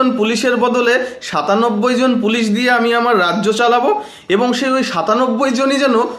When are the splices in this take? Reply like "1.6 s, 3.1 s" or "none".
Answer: none